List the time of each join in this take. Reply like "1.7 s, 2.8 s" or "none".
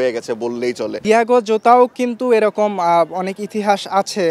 1.1 s